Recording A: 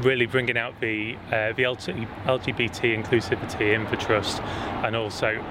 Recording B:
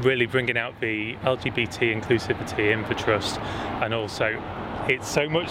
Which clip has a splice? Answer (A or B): B